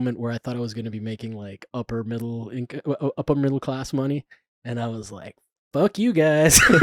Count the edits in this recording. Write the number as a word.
zero